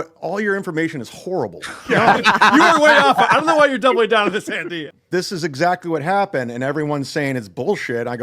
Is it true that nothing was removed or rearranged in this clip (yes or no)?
no